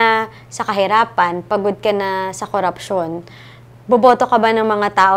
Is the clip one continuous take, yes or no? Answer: yes